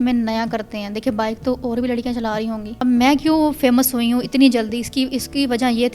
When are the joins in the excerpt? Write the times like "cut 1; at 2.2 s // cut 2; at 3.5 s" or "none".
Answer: cut 1; at 2.7 s